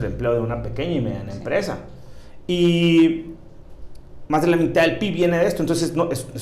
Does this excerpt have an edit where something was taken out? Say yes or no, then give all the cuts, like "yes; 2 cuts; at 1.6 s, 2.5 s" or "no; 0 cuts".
no; 0 cuts